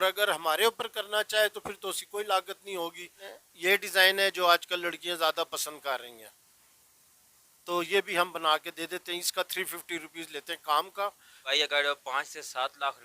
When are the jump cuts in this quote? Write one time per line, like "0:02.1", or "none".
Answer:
0:03.2
0:11.5

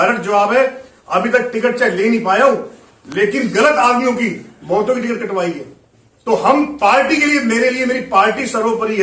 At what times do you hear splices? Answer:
none

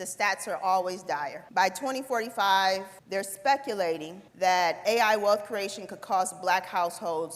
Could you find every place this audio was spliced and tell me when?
0:01.4
0:03.0
0:04.2

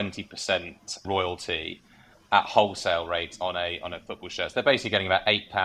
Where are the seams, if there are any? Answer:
none

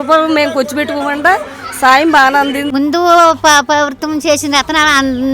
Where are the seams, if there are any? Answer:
0:02.7

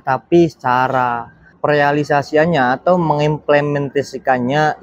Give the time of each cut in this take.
none

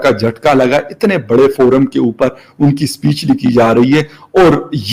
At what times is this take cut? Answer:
none

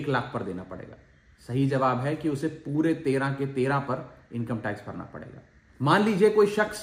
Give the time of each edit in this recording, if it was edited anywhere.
none

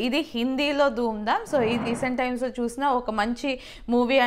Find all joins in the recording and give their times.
0:01.8

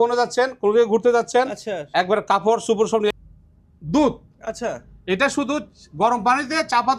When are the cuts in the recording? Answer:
0:03.1

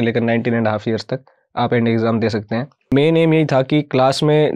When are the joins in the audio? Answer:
0:02.9

